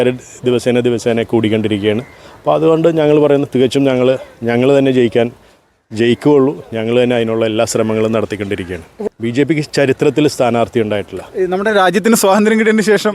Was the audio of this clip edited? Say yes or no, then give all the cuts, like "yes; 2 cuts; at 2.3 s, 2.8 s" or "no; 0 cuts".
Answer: yes; 1 cut; at 8.9 s